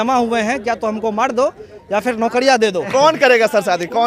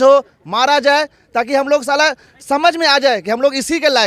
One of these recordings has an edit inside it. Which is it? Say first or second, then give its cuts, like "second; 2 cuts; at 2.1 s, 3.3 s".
first; 1 cut; at 2.8 s